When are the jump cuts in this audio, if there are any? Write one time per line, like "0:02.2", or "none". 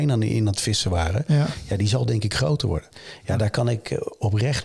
0:02.9